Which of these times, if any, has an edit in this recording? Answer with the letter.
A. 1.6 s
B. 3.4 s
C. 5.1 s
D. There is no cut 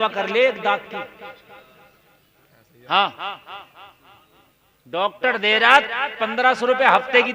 D